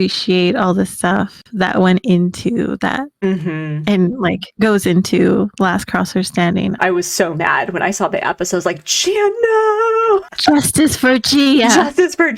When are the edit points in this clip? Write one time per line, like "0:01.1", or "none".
0:06.7
0:10.3